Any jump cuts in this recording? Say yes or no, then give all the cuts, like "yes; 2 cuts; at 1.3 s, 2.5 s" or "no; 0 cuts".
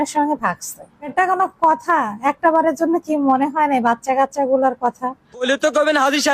yes; 2 cuts; at 1.1 s, 5.4 s